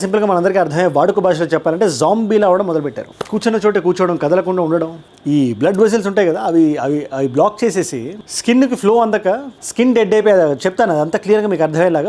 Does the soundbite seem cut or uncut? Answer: uncut